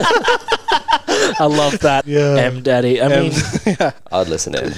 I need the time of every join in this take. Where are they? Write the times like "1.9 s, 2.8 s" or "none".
2.0 s

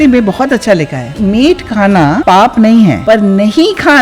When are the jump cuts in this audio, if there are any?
1.1 s, 2.2 s, 3.0 s

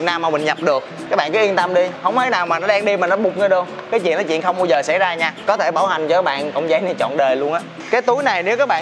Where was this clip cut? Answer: 0.9 s, 5.3 s, 7.8 s

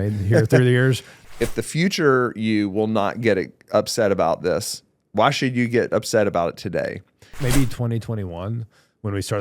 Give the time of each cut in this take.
1.1 s, 7.3 s

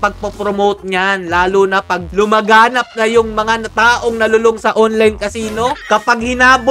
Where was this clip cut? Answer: none

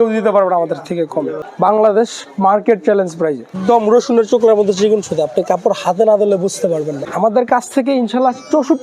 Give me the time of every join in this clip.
1.4 s, 3.5 s, 7.0 s

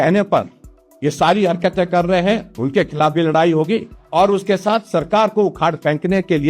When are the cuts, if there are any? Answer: 4.0 s

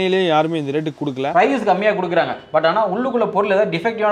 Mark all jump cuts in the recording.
1.3 s

